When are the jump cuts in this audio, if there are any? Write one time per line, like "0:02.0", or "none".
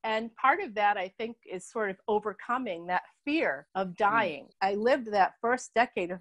0:03.6
0:04.5